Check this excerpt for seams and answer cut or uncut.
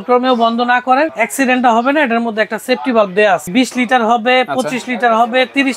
cut